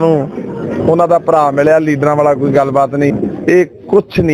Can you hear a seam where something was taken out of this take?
yes; 1 cut; at 3.1 s

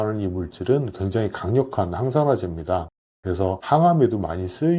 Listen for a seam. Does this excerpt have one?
no; 0 cuts

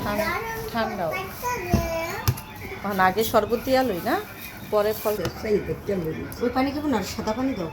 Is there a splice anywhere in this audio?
yes; 1 cut; at 5.2 s

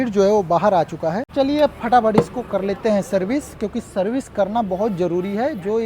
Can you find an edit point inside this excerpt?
yes; 1 cut; at 1.2 s

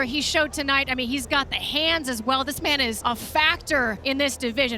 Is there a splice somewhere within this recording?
yes; 2 cuts; at 3.0 s, 4.0 s

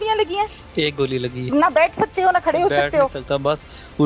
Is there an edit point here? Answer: yes; 1 cut; at 1.5 s

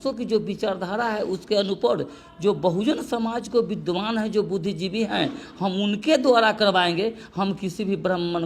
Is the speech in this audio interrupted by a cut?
no; 0 cuts

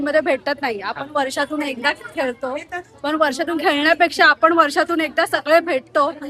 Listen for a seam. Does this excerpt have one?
no; 0 cuts

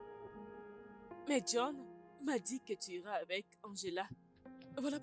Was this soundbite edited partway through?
yes; 1 cut; at 0.9 s

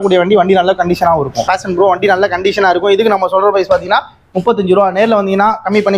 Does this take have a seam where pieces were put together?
yes; 1 cut; at 1.5 s

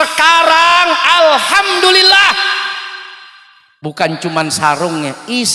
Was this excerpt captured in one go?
yes; 0 cuts

